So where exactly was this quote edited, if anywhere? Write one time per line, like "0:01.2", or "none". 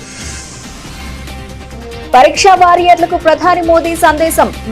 0:01.0